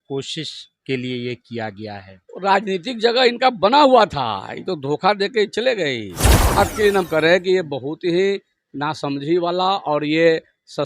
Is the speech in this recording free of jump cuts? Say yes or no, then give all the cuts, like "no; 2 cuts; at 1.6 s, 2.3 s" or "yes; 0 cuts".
no; 1 cut; at 6.6 s